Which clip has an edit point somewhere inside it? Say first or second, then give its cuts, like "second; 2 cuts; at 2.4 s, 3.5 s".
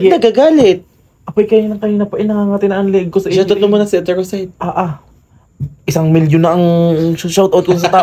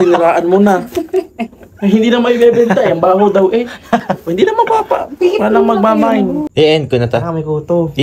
second; 1 cut; at 6.5 s